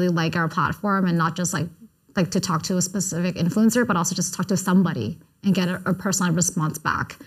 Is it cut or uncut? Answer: uncut